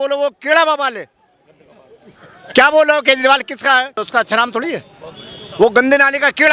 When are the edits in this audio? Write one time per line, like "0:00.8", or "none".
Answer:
0:04.0